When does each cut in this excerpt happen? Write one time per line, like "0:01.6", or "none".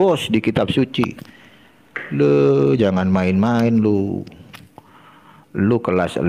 none